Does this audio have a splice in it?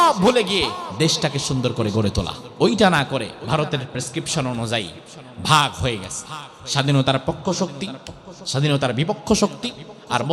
yes; 3 cuts; at 0.8 s, 2.4 s, 3.4 s

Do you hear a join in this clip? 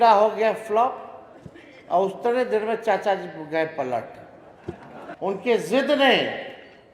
yes; 1 cut; at 5.1 s

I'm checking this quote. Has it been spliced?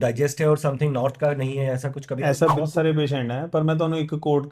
yes; 1 cut; at 2.6 s

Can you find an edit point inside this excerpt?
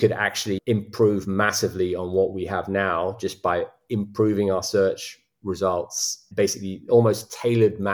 yes; 1 cut; at 6.3 s

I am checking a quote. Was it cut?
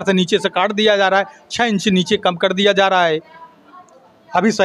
no; 0 cuts

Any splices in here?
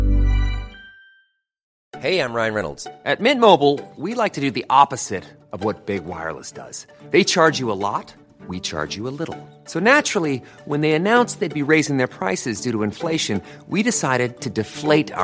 yes; 1 cut; at 1.7 s

